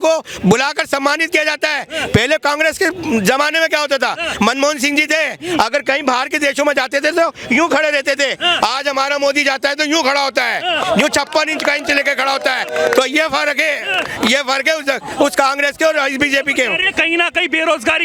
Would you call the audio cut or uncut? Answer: uncut